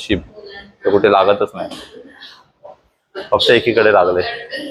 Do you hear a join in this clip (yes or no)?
no